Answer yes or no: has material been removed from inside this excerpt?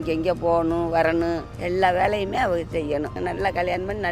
yes